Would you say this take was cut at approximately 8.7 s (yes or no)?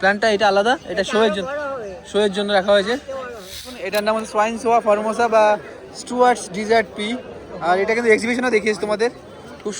no